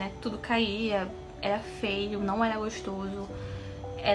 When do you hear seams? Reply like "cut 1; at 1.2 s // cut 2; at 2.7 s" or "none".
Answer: none